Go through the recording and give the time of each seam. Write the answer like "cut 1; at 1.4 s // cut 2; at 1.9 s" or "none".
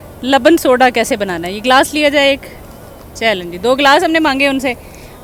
none

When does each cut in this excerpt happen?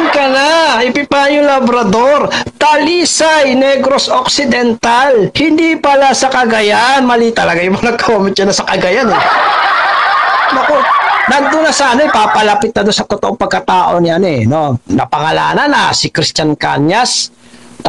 none

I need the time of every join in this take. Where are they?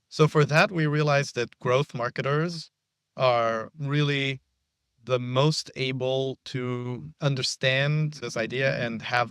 cut 1; at 8.2 s

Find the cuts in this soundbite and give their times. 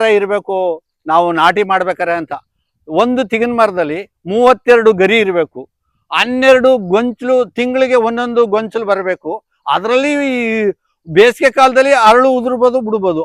none

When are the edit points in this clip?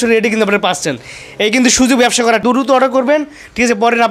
cut 1; at 2.4 s

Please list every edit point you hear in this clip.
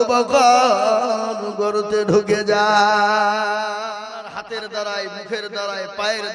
cut 1; at 3.8 s

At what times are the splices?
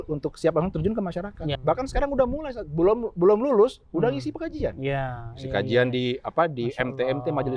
cut 1; at 1.6 s

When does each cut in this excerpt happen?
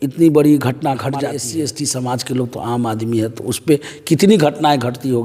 cut 1; at 1.4 s

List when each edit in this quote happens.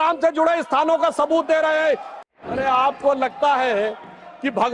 cut 1; at 2.1 s

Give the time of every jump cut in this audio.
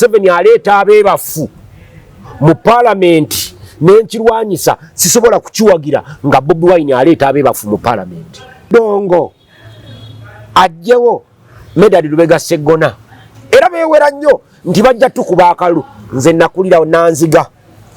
cut 1; at 8.7 s

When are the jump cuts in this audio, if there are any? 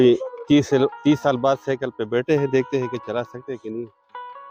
none

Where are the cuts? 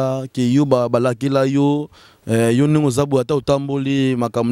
none

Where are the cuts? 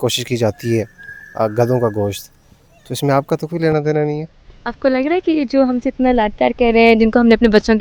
none

